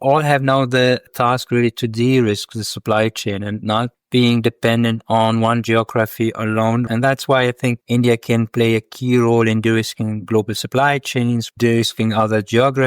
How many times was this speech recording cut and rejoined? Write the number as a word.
one